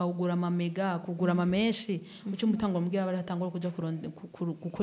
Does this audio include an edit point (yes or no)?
no